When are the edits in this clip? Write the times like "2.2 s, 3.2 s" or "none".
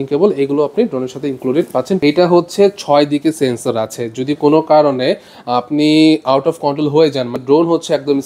2.0 s, 7.3 s